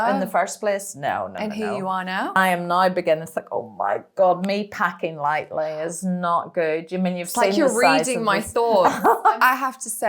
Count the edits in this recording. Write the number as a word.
two